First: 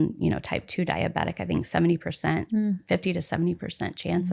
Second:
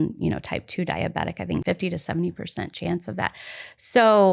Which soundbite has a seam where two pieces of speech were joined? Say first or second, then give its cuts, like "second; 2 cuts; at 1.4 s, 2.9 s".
second; 1 cut; at 1.6 s